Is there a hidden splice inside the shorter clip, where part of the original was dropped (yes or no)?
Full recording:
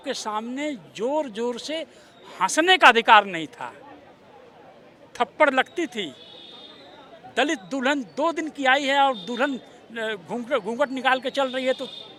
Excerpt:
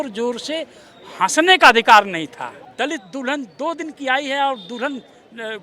yes